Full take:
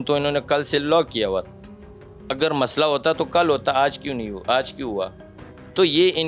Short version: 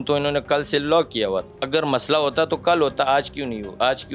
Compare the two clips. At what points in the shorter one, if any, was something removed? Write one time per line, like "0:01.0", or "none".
0:01.6